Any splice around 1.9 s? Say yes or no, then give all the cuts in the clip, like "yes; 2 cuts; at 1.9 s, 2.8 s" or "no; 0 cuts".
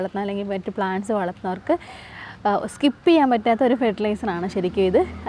no; 0 cuts